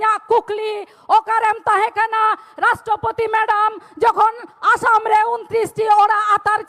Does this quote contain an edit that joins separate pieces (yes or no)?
no